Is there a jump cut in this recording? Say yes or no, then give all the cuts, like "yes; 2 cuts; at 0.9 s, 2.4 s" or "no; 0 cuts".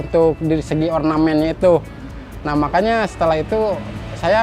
no; 0 cuts